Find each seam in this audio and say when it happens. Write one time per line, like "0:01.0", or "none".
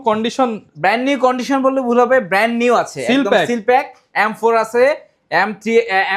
none